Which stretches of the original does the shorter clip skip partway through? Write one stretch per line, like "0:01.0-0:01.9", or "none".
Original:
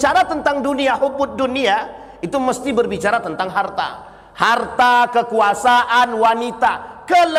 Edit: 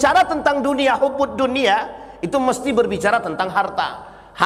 none